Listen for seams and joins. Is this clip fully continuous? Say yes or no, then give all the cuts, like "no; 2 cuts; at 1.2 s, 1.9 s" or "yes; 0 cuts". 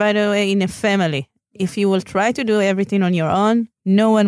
yes; 0 cuts